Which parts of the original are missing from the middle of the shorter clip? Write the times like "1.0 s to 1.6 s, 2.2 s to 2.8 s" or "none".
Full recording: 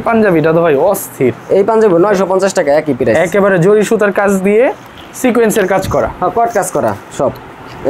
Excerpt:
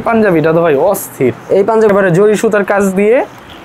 1.9 s to 3.4 s